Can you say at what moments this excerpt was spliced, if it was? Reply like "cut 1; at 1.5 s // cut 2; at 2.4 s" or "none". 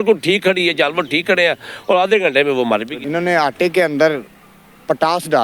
cut 1; at 2.9 s